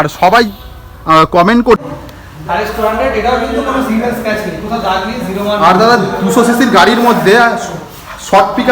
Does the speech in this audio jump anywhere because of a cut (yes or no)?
yes